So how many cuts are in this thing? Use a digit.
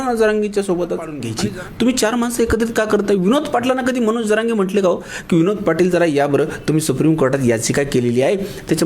1